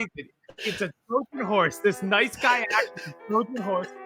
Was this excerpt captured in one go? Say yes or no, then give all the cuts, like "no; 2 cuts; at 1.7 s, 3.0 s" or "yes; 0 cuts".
yes; 0 cuts